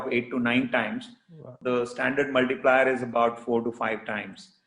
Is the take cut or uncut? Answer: cut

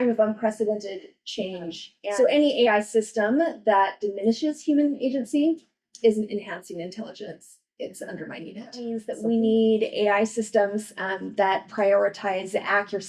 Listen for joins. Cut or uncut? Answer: cut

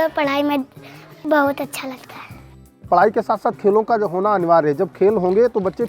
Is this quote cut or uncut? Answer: cut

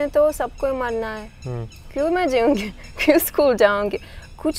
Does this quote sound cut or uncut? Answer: uncut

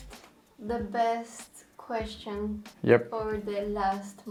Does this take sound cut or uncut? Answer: uncut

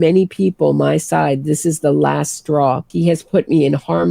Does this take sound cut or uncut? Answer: cut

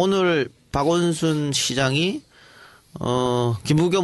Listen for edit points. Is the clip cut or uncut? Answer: uncut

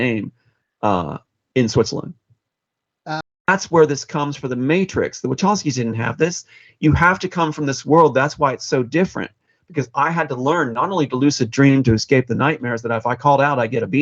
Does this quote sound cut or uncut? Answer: cut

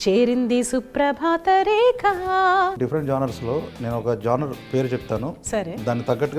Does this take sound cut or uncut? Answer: cut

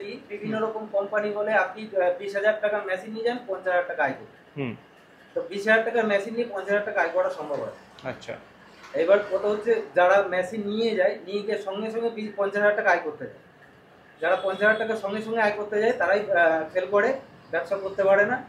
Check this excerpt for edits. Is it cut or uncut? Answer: uncut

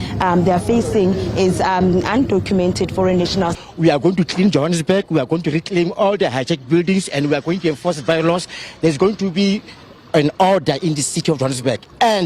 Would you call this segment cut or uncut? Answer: cut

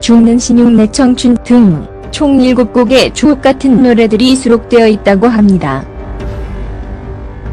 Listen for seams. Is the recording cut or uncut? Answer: cut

